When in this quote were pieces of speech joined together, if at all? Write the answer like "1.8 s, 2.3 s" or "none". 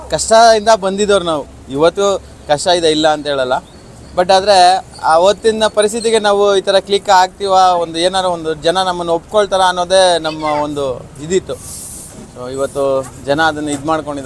none